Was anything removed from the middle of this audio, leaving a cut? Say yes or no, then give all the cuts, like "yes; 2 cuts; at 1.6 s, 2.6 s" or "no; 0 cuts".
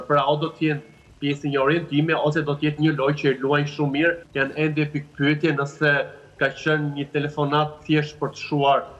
yes; 1 cut; at 4.2 s